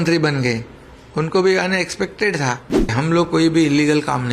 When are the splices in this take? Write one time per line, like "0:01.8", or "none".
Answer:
0:02.6